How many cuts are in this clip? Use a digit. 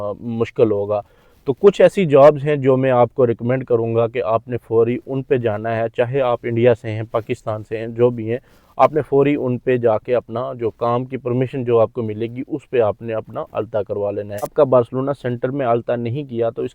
1